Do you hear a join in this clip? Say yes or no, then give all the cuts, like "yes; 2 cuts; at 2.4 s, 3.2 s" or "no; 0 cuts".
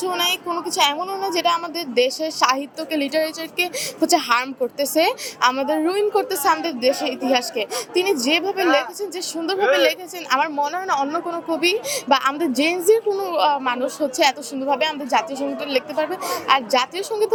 no; 0 cuts